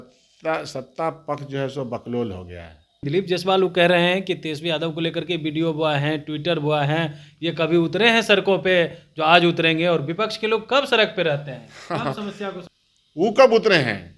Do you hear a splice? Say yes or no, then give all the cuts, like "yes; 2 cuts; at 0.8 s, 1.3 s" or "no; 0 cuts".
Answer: yes; 2 cuts; at 3.0 s, 12.7 s